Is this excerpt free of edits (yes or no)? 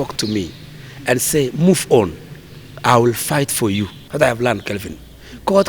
no